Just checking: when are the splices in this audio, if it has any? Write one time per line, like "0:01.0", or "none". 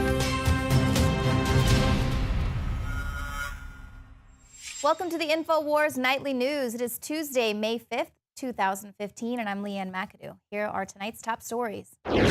0:04.6